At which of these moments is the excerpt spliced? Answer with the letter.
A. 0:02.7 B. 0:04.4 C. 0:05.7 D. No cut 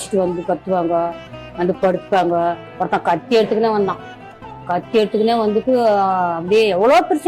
A